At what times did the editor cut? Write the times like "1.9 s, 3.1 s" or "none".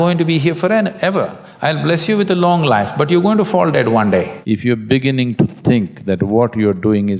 4.4 s